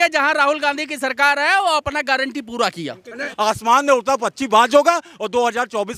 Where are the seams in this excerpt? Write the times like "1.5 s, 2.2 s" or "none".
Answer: 3.3 s

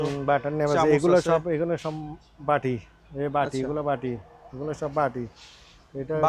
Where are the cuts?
none

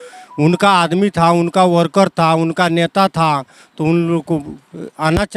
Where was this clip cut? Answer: none

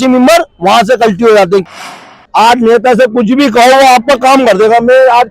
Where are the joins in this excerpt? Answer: 1.7 s

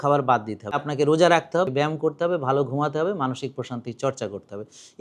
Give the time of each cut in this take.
0.8 s, 1.7 s

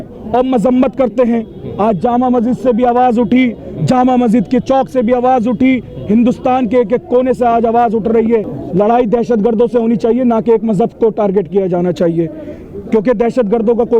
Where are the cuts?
8.6 s

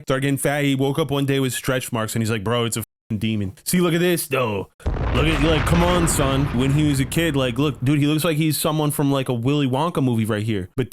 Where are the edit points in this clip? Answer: 3.6 s, 7.8 s

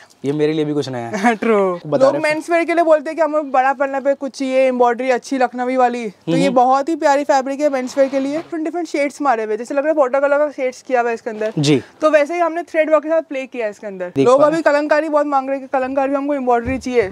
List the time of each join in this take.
1.8 s, 8.6 s, 14.2 s

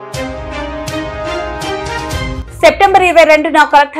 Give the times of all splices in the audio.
2.4 s

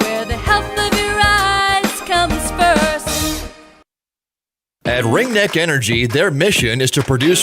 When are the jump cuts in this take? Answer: 4.5 s, 6.3 s

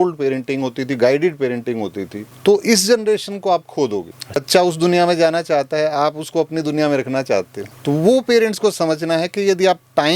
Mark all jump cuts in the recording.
4.4 s

